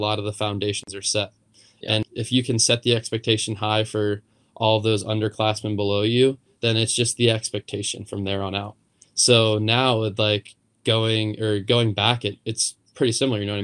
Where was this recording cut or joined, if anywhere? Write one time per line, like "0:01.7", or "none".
0:02.0